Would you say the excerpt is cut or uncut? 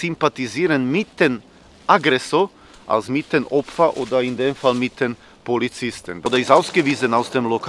cut